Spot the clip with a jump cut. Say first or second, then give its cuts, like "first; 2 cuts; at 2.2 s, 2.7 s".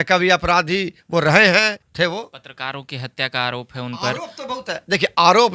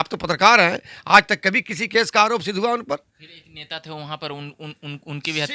first; 1 cut; at 1.8 s